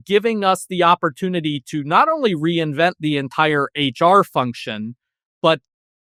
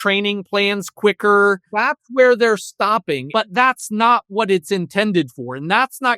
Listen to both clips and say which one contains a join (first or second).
second